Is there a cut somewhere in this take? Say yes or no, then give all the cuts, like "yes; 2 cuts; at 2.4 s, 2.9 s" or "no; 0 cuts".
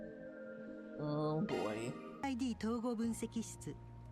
yes; 1 cut; at 2.2 s